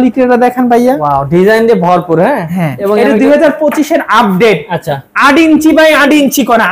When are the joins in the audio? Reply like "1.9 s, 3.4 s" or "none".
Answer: none

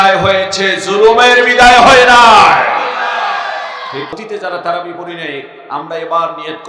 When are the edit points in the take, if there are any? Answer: 4.1 s

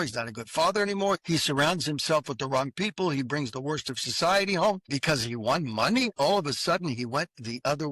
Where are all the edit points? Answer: 1.2 s, 4.9 s

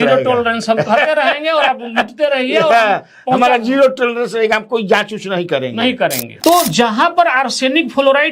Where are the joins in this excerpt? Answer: 6.3 s

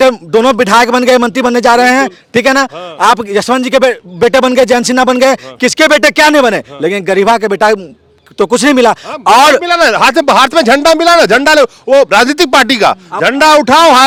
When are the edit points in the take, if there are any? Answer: none

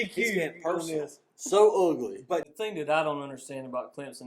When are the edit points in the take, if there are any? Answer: 2.5 s

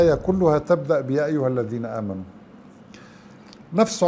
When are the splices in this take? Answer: none

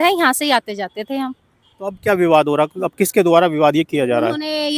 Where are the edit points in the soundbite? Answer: none

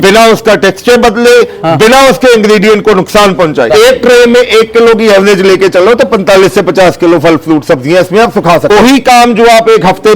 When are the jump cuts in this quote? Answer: 3.7 s, 8.6 s

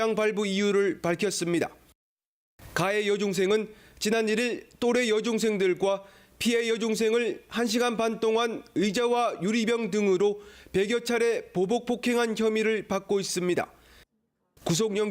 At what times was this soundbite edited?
none

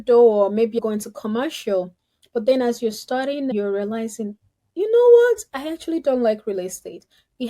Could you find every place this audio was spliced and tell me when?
0.8 s, 3.5 s

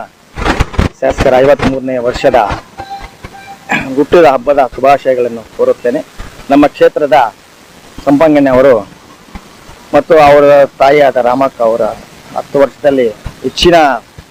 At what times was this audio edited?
none

